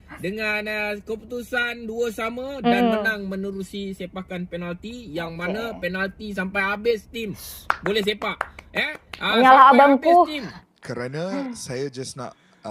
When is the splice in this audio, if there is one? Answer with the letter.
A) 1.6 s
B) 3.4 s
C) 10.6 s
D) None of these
C